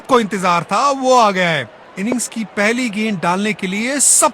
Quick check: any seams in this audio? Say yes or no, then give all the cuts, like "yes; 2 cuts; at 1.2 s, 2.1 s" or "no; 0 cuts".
no; 0 cuts